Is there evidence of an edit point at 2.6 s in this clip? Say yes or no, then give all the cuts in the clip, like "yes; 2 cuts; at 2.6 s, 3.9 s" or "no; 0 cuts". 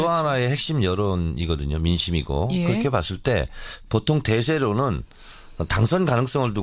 yes; 1 cut; at 2.6 s